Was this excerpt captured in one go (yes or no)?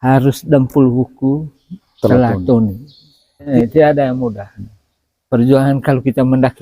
no